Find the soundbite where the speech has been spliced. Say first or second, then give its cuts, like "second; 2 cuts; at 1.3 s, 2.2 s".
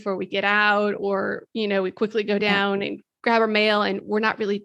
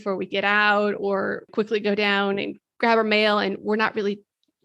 second; 1 cut; at 1.5 s